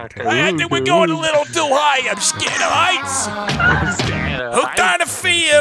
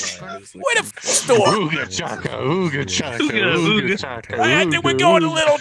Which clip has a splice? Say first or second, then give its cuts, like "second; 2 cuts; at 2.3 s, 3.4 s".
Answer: first; 1 cut; at 4.5 s